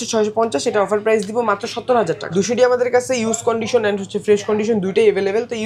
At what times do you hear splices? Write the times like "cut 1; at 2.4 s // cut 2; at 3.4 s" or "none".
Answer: cut 1; at 2.2 s